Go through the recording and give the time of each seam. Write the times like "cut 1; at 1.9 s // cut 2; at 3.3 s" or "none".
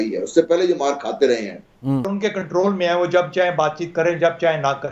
cut 1; at 2.1 s